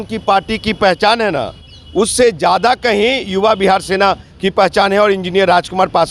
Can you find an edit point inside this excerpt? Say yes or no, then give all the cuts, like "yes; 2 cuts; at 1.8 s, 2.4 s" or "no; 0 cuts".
no; 0 cuts